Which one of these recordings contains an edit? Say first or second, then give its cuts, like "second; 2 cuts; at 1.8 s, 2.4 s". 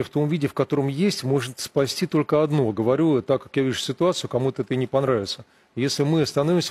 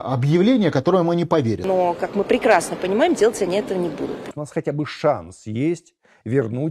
second; 2 cuts; at 1.6 s, 4.3 s